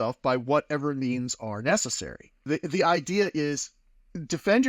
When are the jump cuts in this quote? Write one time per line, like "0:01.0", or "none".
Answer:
0:02.4